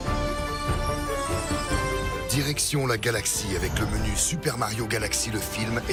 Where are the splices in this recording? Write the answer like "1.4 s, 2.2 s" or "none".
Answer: none